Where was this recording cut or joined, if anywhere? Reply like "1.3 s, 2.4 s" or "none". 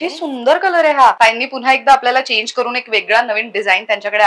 1.2 s